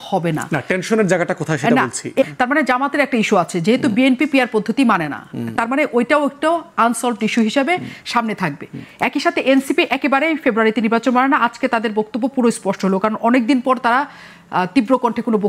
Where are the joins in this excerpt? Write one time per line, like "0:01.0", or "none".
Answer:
0:02.2